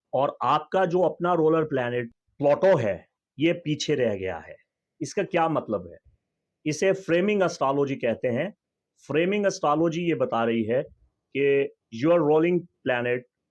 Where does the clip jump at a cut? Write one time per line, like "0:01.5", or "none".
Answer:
0:02.2